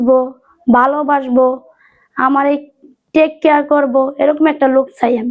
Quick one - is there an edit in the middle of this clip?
no; 0 cuts

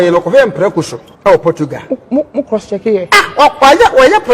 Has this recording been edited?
yes; 1 cut; at 1.0 s

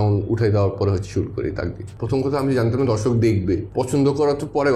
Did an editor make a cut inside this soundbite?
yes; 2 cuts; at 1.9 s, 3.7 s

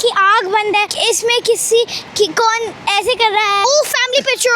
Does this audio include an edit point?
yes; 2 cuts; at 0.9 s, 3.6 s

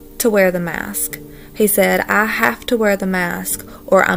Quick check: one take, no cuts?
yes; 0 cuts

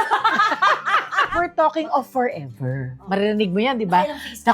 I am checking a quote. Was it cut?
yes; 2 cuts; at 1.2 s, 3.0 s

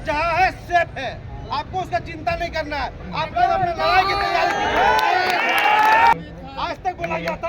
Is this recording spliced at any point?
yes; 1 cut; at 6.1 s

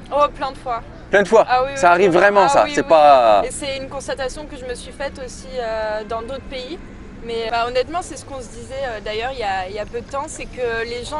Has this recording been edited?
yes; 1 cut; at 7.5 s

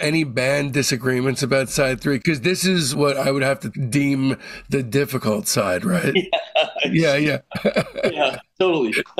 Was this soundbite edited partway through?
no; 0 cuts

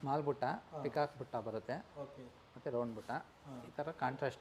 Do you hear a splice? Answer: no; 0 cuts

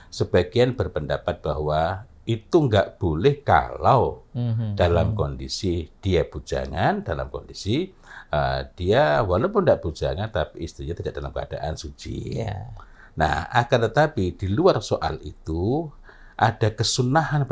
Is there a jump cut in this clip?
no; 0 cuts

